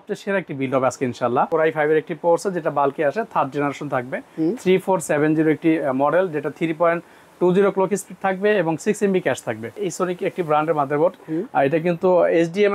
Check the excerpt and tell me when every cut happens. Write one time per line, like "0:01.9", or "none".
0:01.5
0:09.8

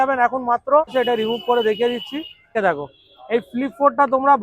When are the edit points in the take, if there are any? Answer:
0:00.9
0:02.5

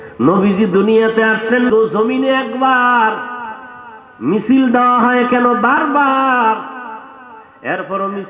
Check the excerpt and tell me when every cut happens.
0:01.7

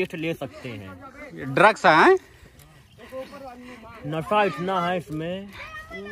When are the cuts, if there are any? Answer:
none

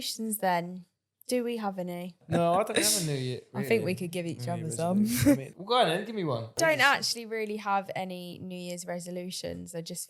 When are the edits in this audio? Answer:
0:02.2
0:03.4
0:05.5
0:06.6

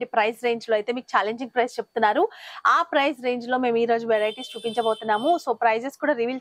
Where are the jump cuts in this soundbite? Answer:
none

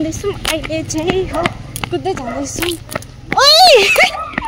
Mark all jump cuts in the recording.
none

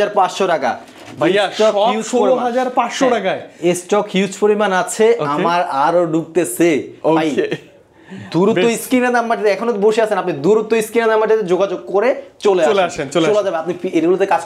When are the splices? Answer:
none

